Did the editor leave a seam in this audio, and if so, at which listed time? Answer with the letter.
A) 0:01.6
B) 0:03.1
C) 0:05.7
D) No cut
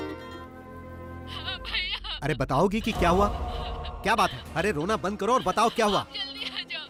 D